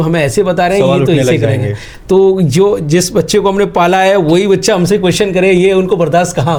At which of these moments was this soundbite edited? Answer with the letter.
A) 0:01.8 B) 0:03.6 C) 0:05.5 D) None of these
D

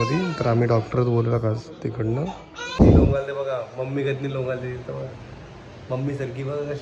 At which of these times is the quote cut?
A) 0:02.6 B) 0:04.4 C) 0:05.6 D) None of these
A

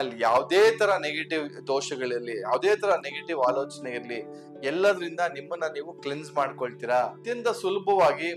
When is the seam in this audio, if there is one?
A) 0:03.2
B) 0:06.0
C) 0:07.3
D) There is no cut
C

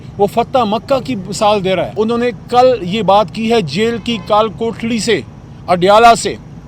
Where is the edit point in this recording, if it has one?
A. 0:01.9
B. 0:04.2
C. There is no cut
A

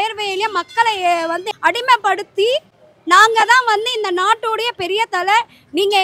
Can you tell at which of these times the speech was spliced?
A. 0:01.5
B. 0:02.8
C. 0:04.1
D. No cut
A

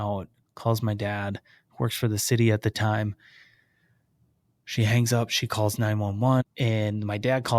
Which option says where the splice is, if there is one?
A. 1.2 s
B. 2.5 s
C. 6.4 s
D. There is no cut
C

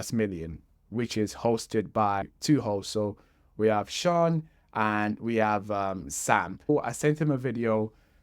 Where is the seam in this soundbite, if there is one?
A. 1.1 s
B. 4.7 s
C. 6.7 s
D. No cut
C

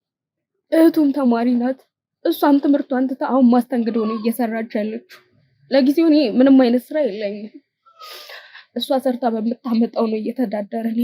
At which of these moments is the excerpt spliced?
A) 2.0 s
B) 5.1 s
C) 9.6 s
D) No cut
D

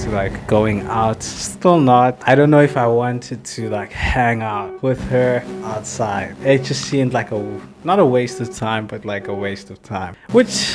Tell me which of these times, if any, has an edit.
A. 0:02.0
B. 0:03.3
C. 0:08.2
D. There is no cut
D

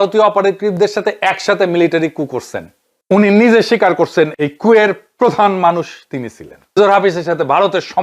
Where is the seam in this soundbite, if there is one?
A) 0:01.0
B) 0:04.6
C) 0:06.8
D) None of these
C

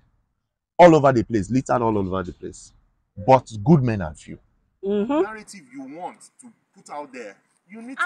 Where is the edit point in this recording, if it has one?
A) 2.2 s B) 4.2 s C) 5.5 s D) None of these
C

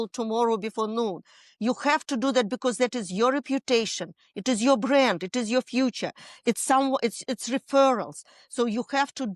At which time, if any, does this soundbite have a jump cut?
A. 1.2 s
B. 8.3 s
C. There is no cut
C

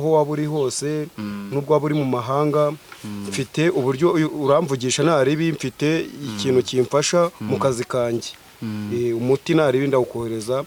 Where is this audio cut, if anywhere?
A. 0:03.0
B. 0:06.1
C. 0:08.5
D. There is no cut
D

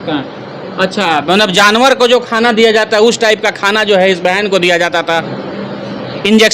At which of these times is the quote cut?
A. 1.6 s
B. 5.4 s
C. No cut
B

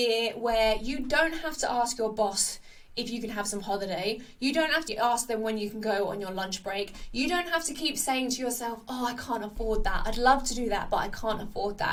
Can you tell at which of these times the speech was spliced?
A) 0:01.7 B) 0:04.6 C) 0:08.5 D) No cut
D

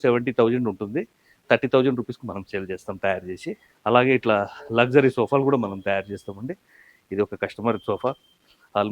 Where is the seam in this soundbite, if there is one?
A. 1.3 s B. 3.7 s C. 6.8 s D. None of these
B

